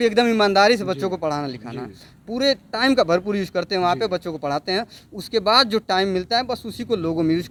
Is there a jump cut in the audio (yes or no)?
no